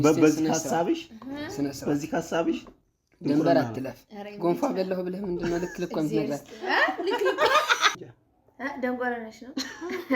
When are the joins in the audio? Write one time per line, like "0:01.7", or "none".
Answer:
0:08.0